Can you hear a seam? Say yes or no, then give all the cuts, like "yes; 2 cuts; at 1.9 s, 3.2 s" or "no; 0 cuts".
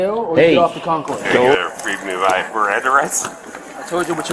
yes; 1 cut; at 1.5 s